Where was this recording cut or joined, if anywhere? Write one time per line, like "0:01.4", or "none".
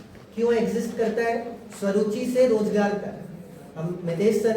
0:02.6